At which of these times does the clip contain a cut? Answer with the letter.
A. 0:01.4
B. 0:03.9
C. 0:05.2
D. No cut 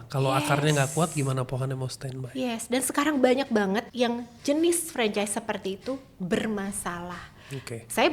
B